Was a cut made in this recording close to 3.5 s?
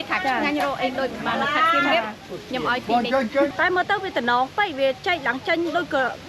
yes; 1 cut; at 3.5 s

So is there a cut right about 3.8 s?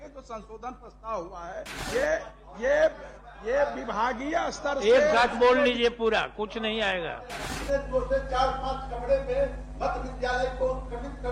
no; 2 cuts; at 1.8 s, 7.3 s

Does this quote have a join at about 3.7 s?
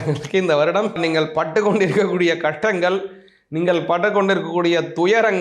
no; 1 cut; at 1.0 s

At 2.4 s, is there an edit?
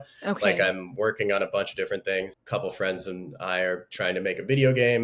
yes; 1 cut; at 2.4 s

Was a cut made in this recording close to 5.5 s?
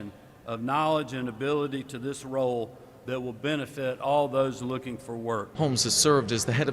yes; 1 cut; at 5.5 s

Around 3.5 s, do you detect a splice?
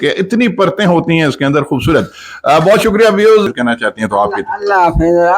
yes; 1 cut; at 3.5 s

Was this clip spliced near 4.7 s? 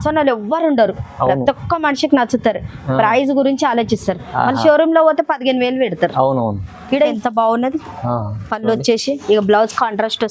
no; 1 cut; at 7.1 s

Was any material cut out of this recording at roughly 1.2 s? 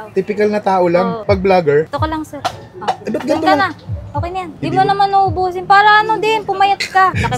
yes; 2 cuts; at 1.2 s, 4.5 s

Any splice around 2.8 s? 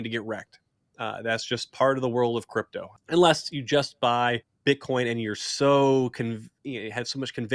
yes; 2 cuts; at 2.8 s, 4.5 s

